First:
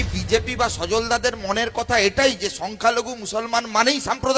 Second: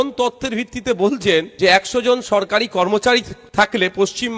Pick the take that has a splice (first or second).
second